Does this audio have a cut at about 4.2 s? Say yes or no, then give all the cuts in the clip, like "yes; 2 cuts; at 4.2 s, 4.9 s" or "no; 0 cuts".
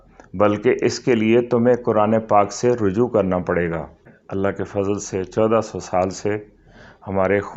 yes; 1 cut; at 4.2 s